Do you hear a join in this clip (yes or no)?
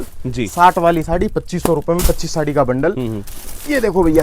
no